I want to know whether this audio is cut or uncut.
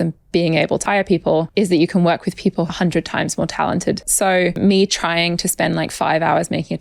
cut